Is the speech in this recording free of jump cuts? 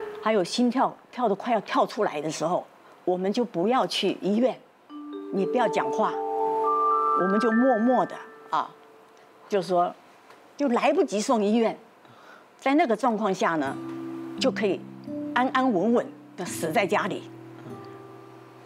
yes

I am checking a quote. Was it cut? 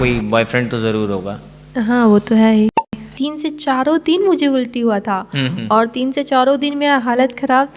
yes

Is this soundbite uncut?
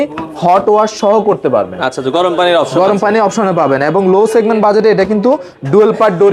yes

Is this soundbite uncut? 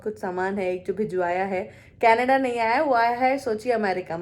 yes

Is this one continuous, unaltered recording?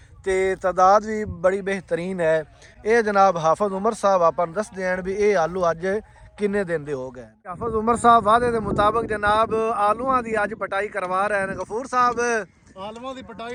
yes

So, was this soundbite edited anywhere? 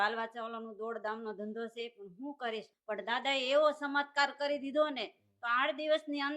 yes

